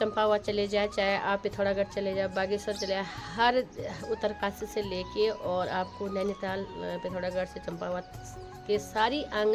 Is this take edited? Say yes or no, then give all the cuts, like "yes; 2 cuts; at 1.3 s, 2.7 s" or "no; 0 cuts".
no; 0 cuts